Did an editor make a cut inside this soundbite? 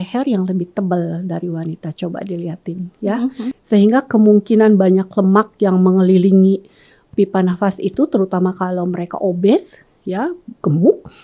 yes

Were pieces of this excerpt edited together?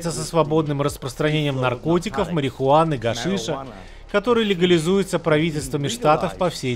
no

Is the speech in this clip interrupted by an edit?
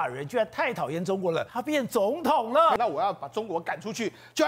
yes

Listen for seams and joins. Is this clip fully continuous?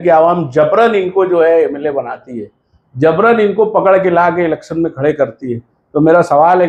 yes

